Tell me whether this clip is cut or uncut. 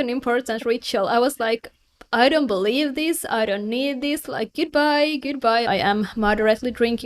cut